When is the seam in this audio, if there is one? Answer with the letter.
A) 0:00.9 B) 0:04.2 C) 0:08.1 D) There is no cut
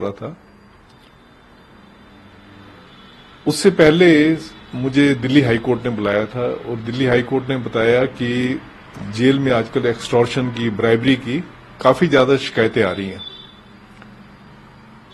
D